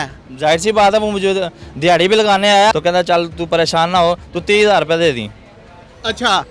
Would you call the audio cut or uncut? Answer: cut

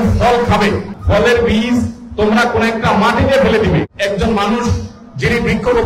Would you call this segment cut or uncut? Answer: cut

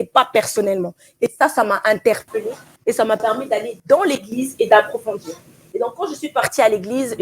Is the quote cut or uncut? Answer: uncut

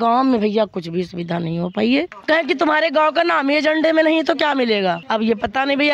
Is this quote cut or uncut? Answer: cut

